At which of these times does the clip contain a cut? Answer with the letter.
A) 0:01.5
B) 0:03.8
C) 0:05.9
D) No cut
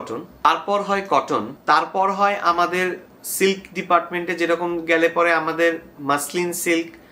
A